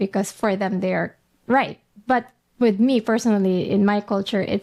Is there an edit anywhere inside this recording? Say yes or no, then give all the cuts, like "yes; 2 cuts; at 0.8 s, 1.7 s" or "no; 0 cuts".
no; 0 cuts